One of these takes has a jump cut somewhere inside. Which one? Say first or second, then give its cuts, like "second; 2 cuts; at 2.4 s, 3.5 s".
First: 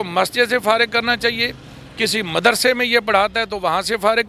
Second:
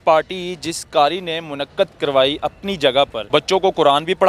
second; 1 cut; at 3.2 s